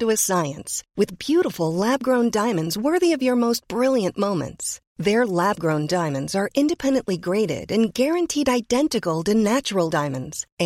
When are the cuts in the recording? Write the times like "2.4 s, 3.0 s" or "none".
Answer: none